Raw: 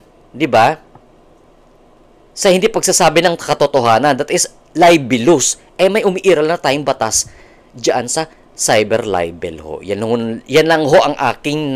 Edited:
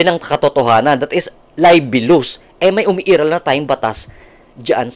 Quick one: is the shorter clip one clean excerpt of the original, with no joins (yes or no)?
yes